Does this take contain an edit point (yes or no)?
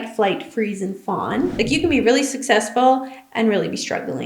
yes